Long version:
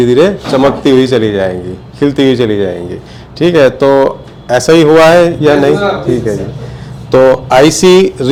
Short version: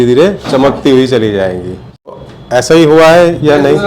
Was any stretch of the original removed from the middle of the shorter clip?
yes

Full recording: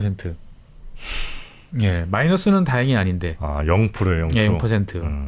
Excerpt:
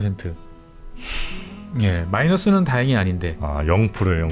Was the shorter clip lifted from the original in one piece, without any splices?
yes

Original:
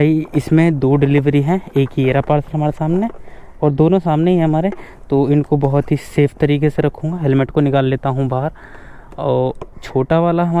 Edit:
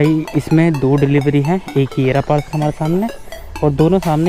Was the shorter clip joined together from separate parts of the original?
no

